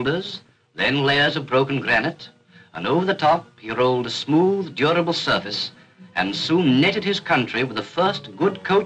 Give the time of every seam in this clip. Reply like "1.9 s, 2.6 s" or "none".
none